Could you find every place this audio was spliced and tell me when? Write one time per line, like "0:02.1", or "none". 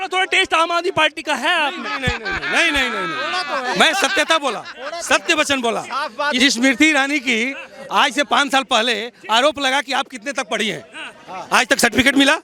none